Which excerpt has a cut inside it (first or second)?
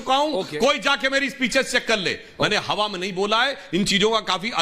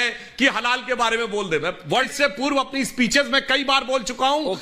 second